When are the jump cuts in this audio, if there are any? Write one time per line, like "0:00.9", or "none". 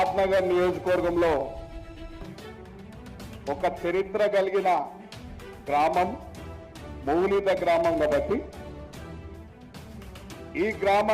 none